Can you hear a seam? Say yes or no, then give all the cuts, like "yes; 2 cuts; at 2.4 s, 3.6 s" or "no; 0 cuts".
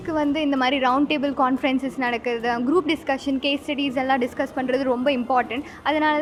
no; 0 cuts